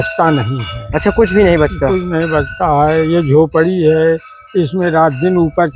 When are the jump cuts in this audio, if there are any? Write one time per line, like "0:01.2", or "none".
none